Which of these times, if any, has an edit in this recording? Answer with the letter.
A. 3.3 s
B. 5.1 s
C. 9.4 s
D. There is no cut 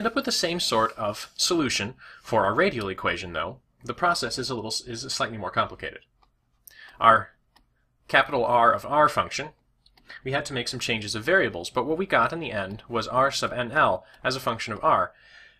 B